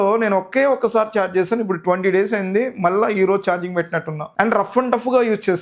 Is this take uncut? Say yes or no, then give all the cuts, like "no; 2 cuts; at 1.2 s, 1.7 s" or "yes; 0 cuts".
yes; 0 cuts